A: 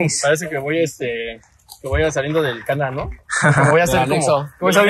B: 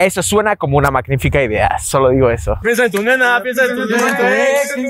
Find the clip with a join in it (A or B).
B